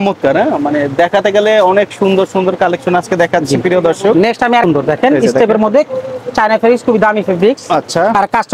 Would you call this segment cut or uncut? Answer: uncut